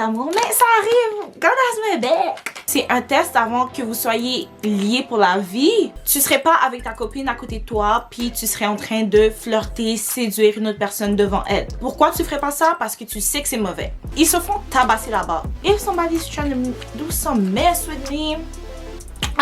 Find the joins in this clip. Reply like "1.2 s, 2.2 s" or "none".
2.5 s, 5.9 s, 11.8 s, 14.0 s

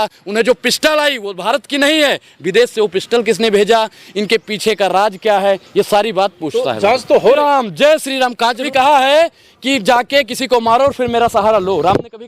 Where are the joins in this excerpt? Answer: 7.4 s, 8.7 s

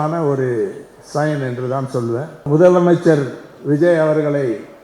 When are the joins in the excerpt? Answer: 2.5 s

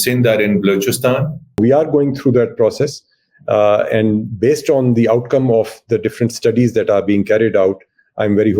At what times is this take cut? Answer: 1.6 s

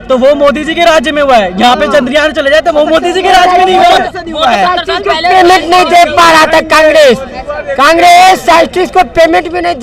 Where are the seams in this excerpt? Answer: none

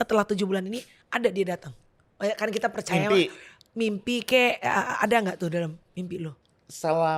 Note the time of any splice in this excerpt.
none

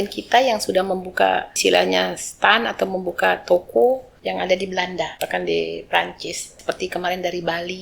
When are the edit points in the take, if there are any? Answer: 1.5 s, 4.1 s, 5.2 s, 6.6 s

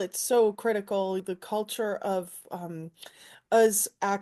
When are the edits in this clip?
1.2 s

